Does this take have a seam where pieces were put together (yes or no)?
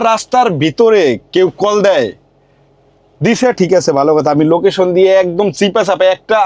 no